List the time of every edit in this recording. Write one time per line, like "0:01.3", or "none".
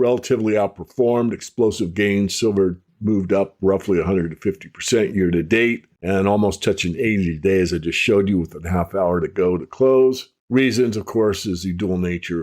0:05.9
0:10.3